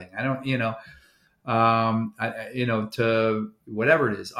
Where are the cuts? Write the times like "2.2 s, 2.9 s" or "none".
none